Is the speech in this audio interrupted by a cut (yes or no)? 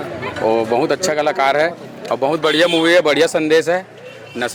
no